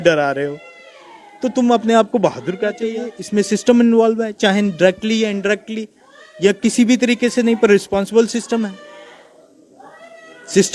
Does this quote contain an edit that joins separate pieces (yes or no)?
yes